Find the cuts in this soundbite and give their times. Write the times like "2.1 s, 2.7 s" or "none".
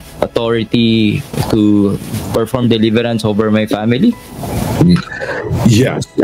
none